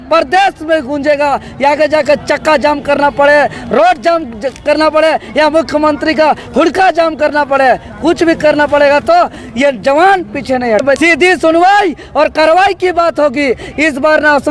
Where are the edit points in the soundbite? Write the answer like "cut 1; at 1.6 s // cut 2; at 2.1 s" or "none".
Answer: cut 1; at 10.8 s

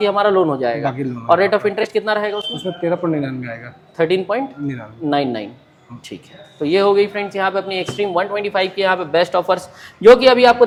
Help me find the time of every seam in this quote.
none

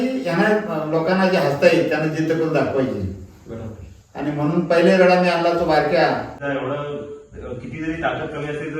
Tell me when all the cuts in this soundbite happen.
cut 1; at 6.4 s

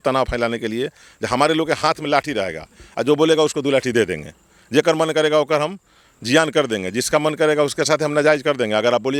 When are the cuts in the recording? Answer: none

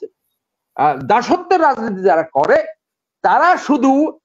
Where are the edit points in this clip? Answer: none

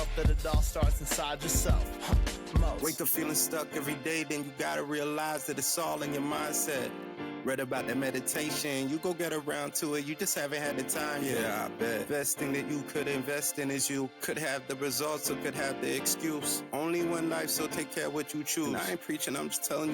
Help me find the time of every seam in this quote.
none

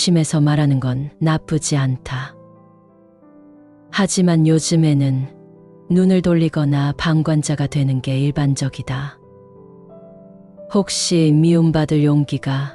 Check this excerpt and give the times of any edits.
cut 1; at 9.4 s // cut 2; at 10.7 s

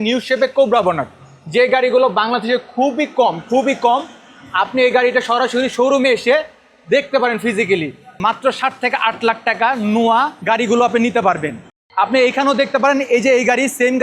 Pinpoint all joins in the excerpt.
cut 1; at 8.2 s

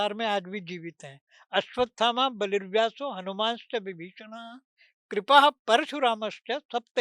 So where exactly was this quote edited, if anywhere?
none

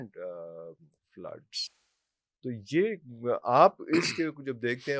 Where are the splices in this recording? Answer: none

